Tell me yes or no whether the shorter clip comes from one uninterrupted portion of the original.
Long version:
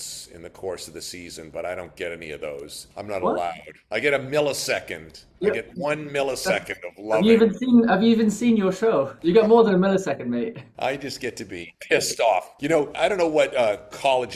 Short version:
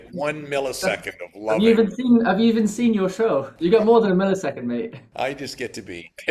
yes